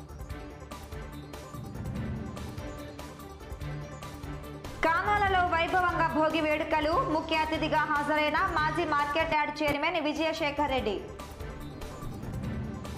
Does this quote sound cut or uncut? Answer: cut